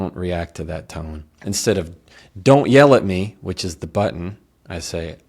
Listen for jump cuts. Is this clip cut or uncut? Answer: cut